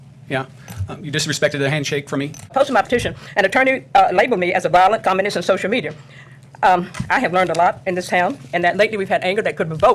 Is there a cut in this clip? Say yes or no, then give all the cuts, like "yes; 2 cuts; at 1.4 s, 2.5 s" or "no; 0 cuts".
yes; 1 cut; at 2.5 s